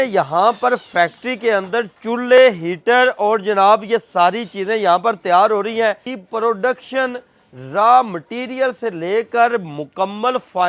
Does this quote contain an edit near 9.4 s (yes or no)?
no